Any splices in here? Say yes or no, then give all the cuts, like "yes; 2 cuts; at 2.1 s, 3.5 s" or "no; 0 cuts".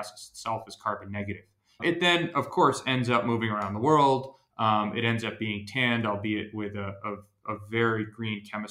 yes; 1 cut; at 1.8 s